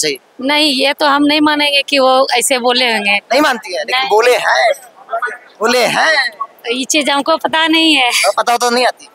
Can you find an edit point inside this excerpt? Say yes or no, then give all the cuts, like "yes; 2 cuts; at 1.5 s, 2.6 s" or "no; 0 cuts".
no; 0 cuts